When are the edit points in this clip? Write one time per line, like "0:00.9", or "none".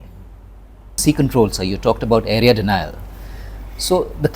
0:00.9